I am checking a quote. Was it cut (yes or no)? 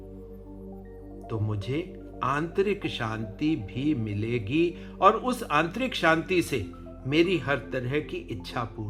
no